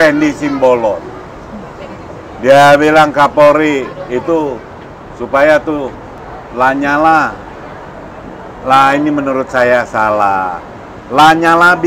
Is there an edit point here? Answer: no; 0 cuts

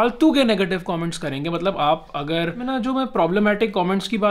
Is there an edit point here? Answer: yes; 1 cut; at 2.6 s

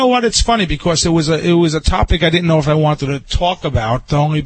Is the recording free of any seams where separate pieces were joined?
yes; 0 cuts

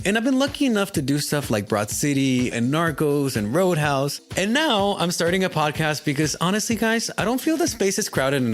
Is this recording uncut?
no; 1 cut; at 4.2 s

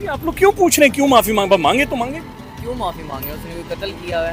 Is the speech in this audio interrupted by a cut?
no; 0 cuts

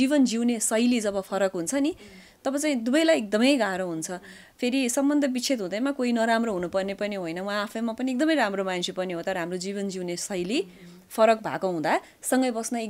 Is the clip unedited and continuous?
yes; 0 cuts

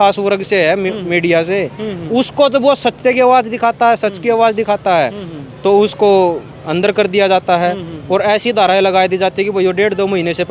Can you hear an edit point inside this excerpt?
no; 0 cuts

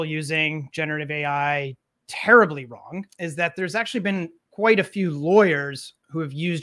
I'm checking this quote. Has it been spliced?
yes; 2 cuts; at 3.1 s, 4.4 s

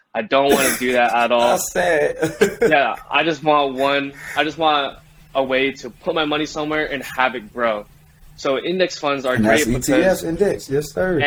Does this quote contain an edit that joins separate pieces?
no; 0 cuts

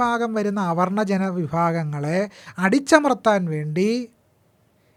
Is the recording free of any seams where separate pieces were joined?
yes; 0 cuts

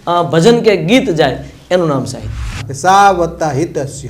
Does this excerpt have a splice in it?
yes; 1 cut; at 2.6 s

